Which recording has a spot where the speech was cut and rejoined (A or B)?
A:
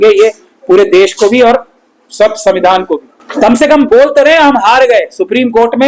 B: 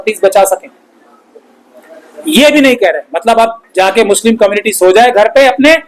A